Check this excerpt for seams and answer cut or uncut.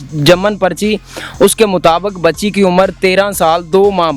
uncut